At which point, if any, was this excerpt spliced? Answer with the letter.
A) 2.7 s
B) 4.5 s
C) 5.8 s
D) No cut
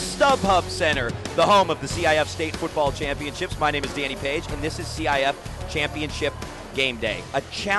D